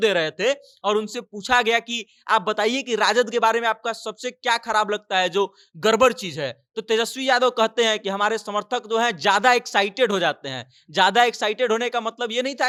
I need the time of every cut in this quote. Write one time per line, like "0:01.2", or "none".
none